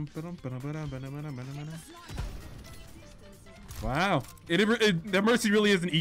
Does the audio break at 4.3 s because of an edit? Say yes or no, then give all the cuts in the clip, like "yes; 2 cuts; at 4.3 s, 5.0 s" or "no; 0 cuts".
yes; 1 cut; at 4.3 s